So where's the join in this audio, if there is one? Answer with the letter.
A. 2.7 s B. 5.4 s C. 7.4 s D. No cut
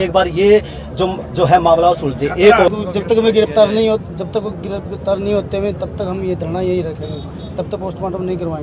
A